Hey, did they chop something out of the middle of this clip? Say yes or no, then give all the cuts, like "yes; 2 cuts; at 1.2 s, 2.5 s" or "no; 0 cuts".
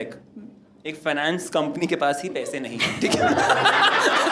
no; 0 cuts